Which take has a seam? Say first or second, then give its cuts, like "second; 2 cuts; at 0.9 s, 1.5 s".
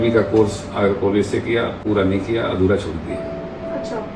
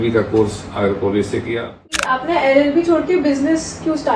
second; 1 cut; at 1.9 s